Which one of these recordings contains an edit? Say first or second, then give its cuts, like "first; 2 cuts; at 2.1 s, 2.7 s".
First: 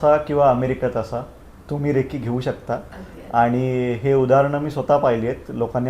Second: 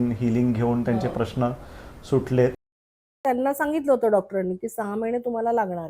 second; 1 cut; at 3.1 s